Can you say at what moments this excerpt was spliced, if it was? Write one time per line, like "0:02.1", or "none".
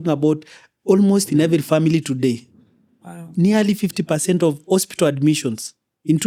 none